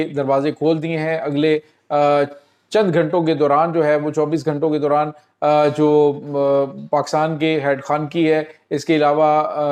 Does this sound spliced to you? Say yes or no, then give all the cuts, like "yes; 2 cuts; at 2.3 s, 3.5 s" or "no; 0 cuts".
no; 0 cuts